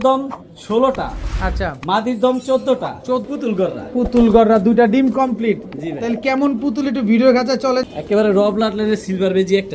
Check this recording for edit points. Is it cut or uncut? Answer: cut